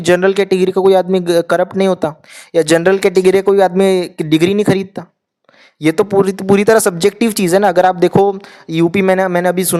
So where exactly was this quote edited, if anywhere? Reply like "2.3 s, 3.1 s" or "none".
none